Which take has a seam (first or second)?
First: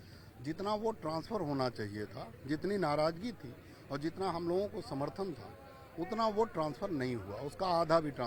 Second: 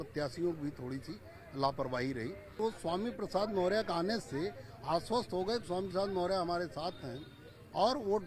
second